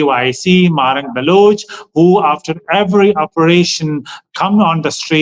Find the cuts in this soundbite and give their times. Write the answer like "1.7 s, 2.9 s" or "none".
none